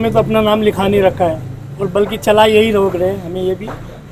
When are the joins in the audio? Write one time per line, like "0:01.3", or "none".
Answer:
none